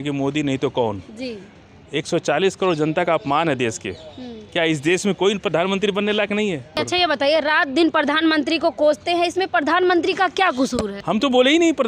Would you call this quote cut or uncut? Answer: cut